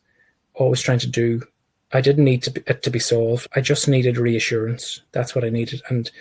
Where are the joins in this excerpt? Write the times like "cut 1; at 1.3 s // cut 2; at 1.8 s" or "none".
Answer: cut 1; at 3.4 s